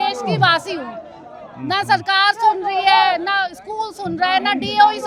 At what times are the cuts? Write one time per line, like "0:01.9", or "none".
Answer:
none